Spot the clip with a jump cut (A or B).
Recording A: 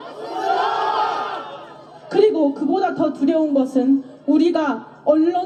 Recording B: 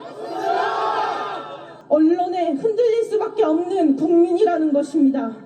B